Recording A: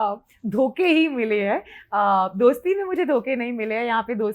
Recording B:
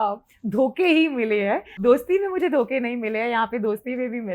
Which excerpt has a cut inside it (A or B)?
B